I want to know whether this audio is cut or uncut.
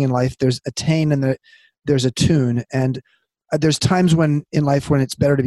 uncut